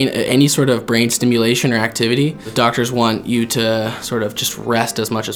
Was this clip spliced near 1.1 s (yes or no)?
no